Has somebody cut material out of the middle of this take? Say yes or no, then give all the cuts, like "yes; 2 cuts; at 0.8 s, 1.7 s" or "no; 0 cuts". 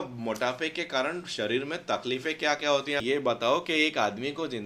yes; 1 cut; at 3.0 s